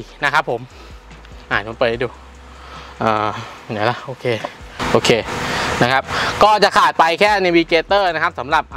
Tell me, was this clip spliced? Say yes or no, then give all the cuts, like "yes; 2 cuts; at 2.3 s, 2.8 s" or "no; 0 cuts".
no; 0 cuts